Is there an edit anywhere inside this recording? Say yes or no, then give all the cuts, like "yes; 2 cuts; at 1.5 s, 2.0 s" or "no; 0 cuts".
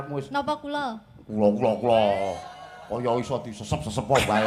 no; 0 cuts